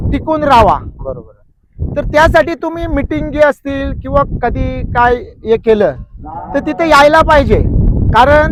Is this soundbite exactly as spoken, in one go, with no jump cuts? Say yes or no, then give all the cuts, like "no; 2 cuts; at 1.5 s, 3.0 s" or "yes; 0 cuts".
yes; 0 cuts